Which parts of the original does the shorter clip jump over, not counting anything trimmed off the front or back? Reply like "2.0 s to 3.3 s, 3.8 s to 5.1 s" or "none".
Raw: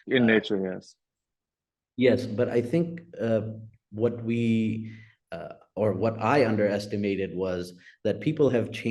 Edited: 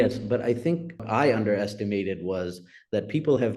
3.1 s to 6.2 s